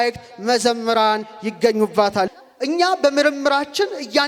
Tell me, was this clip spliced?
yes; 1 cut; at 2.3 s

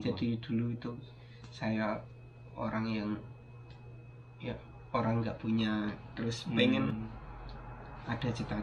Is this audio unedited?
yes; 0 cuts

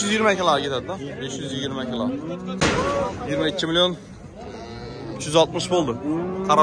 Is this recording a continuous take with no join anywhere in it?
no; 1 cut; at 2.6 s

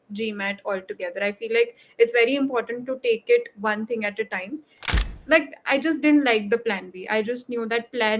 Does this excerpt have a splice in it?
yes; 1 cut; at 5.0 s

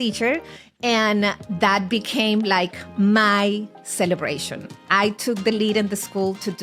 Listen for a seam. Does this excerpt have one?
no; 0 cuts

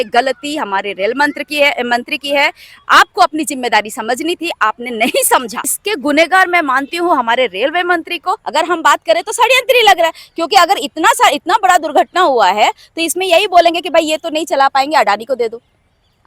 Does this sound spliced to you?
yes; 2 cuts; at 5.7 s, 8.4 s

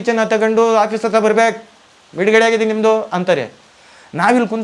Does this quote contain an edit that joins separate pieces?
no; 0 cuts

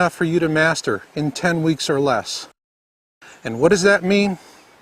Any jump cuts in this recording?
yes; 1 cut; at 3.7 s

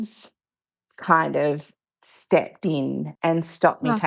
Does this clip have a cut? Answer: yes; 1 cut; at 3.1 s

